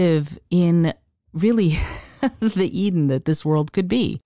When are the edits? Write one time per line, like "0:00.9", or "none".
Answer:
none